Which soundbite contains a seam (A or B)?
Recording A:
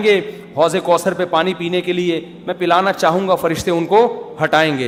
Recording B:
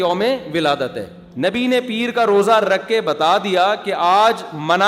B